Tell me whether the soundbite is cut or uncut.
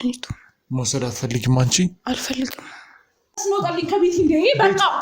cut